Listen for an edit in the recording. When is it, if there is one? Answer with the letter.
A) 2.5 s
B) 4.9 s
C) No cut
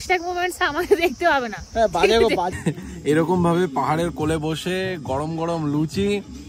A